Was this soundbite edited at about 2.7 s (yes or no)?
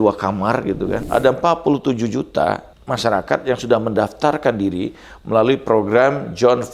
yes